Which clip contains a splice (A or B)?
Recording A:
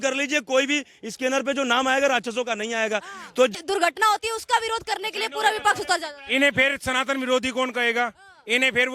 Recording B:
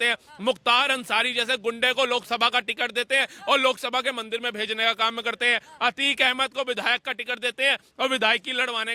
A